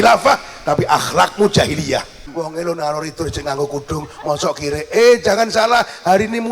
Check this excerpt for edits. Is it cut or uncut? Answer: cut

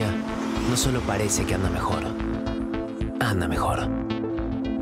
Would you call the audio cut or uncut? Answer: uncut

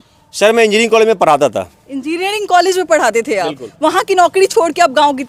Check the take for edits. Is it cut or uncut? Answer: uncut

